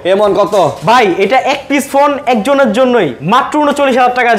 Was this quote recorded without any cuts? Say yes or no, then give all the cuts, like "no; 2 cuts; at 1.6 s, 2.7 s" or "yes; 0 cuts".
yes; 0 cuts